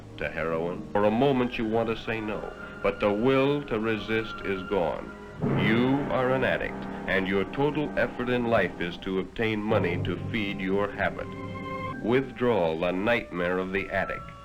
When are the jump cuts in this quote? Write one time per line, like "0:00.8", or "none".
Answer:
0:00.9
0:05.2
0:11.9